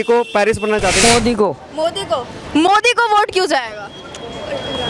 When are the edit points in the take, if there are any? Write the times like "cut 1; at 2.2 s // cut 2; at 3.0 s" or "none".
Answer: cut 1; at 1.0 s